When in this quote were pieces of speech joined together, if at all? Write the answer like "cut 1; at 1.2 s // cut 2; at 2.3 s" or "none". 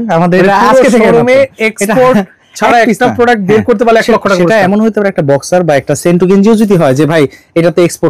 none